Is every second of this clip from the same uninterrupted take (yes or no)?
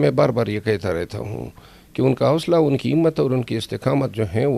yes